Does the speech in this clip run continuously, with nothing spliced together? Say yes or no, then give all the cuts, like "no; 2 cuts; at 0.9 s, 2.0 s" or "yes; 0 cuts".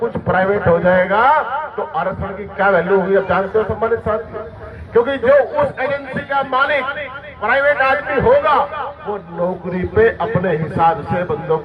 yes; 0 cuts